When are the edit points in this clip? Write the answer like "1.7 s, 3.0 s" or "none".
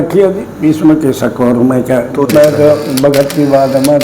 2.3 s